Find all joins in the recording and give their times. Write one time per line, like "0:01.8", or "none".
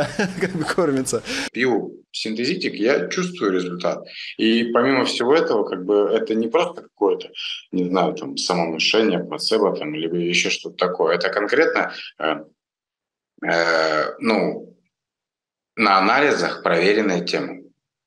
0:01.5